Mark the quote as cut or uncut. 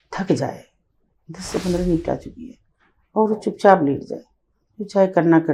uncut